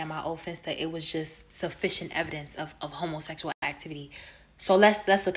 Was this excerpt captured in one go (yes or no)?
yes